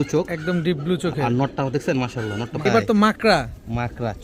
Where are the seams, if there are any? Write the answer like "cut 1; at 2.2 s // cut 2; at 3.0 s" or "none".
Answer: cut 1; at 2.6 s